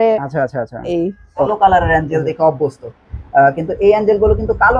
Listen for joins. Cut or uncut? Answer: cut